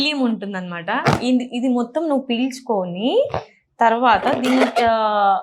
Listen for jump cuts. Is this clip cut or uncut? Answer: uncut